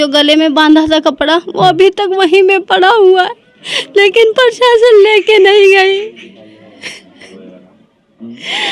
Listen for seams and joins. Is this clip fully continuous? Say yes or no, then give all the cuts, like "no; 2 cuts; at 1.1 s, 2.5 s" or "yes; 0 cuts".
yes; 0 cuts